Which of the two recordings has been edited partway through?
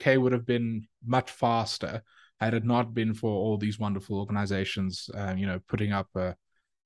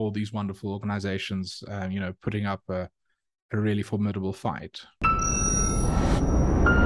second; 1 cut; at 4.8 s

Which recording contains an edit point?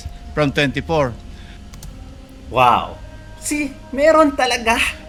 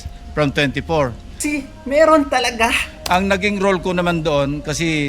second; 1 cut; at 1.3 s

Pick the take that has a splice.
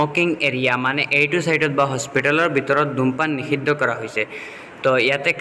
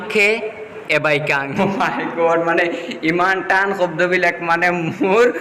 second; 1 cut; at 1.6 s

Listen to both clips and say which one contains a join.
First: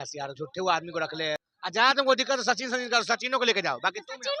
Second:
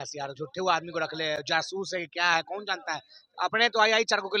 first; 1 cut; at 1.4 s

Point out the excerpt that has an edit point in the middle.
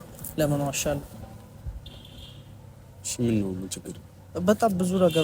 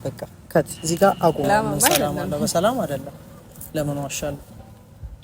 second; 1 cut; at 1.5 s

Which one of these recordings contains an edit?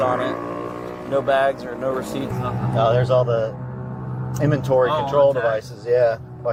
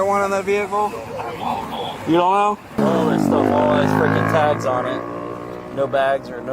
second; 1 cut; at 2.8 s

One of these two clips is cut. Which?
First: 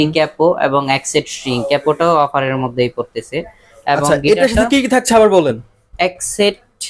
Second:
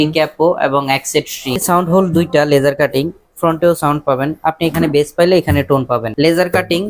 second; 2 cuts; at 1.6 s, 6.1 s

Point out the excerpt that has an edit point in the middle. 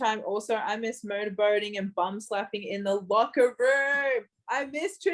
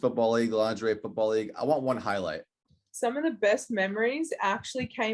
second; 1 cut; at 2.5 s

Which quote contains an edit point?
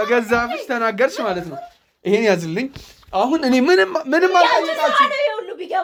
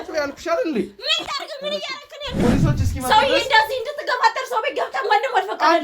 second; 1 cut; at 2.4 s

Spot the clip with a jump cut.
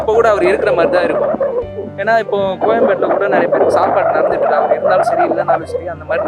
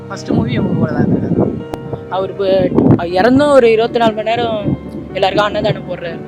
second; 1 cut; at 1.7 s

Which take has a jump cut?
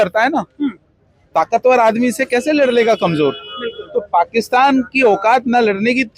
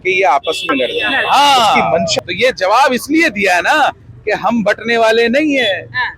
second; 1 cut; at 1.1 s

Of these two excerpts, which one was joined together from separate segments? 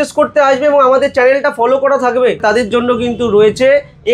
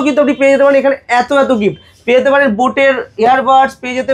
first; 1 cut; at 2.4 s

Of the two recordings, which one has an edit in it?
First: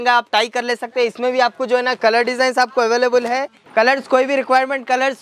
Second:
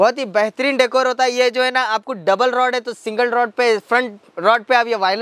first; 1 cut; at 3.6 s

